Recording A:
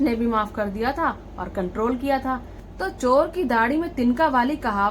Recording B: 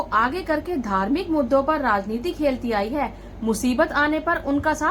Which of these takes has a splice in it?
A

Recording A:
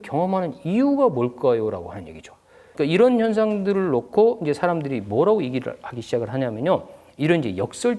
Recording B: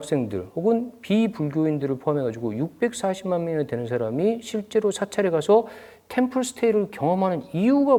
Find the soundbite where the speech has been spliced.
A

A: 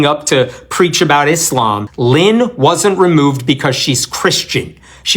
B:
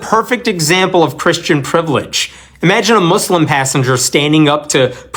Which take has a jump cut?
A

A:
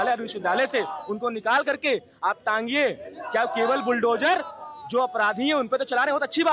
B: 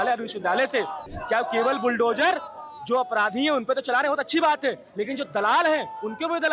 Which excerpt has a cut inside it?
B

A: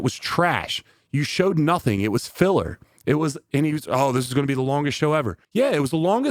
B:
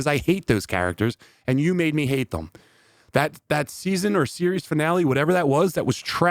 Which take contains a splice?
A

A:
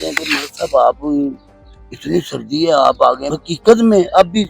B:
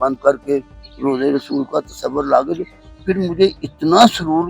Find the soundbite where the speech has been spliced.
A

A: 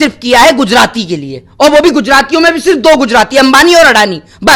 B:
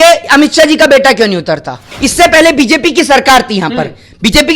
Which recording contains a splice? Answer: B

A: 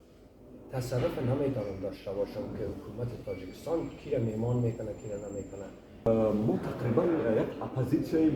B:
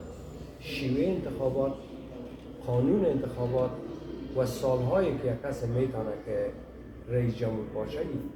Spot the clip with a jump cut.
A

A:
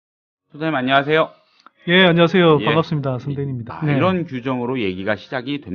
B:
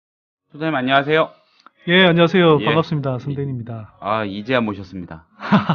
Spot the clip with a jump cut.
B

